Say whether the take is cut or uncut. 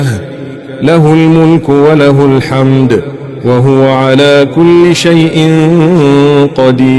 uncut